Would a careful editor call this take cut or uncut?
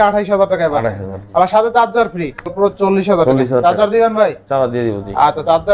cut